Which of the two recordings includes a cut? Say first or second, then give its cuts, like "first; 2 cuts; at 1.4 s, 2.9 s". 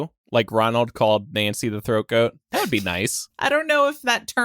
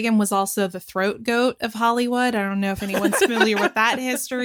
first; 1 cut; at 3.2 s